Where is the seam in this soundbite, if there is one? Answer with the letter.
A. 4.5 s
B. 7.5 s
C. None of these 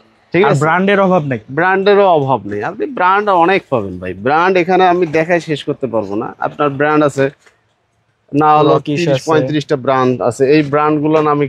C